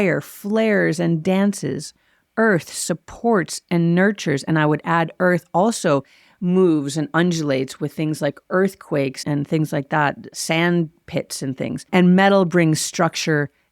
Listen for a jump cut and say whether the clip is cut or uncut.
cut